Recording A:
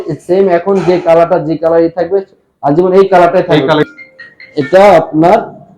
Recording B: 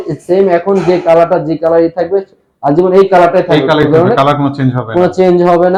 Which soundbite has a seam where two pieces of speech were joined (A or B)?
A